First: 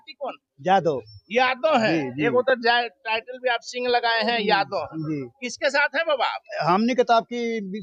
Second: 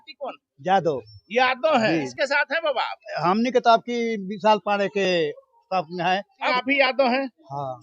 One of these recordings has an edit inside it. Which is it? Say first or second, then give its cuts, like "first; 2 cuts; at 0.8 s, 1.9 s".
second; 2 cuts; at 2.1 s, 6.6 s